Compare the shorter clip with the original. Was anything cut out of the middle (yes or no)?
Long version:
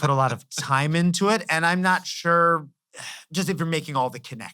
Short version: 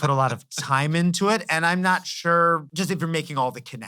yes